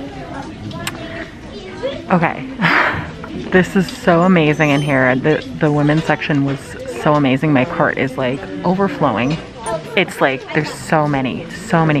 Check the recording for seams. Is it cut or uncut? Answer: cut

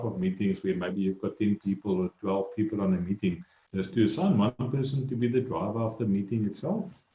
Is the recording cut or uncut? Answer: uncut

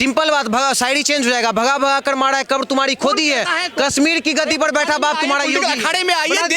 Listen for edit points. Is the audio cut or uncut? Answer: uncut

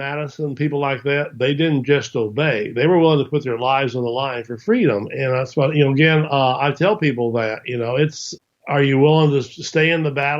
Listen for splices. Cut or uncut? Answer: uncut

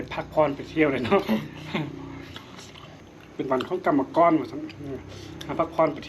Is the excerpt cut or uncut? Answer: cut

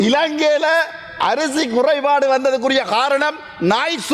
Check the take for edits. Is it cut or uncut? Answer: uncut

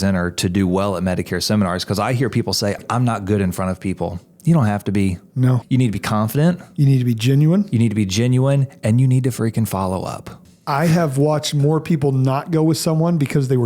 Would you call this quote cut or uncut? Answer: cut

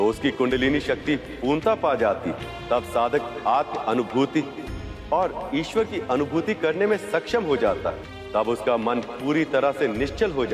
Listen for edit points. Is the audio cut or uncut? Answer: cut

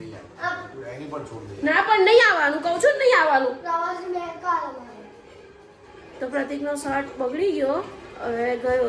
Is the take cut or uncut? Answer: uncut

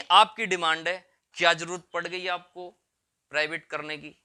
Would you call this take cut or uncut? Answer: uncut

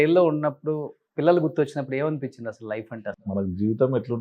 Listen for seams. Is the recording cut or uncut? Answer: cut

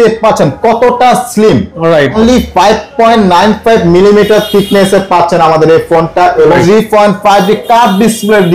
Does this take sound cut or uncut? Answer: cut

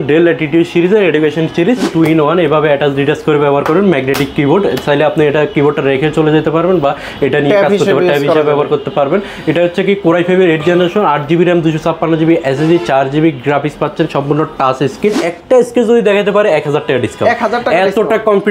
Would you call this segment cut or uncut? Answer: cut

